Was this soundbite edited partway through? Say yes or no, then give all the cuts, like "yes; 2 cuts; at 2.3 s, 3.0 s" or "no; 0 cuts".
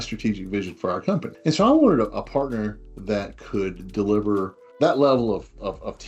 yes; 2 cuts; at 1.3 s, 4.6 s